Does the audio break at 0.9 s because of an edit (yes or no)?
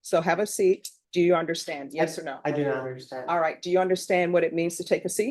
yes